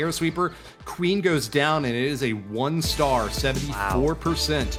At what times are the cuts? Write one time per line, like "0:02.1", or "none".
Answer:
none